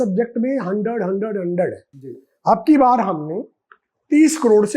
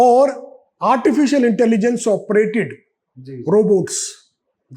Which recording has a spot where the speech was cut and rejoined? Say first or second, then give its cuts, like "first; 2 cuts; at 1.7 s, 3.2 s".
first; 1 cut; at 1.9 s